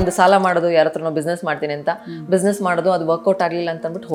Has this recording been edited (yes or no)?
no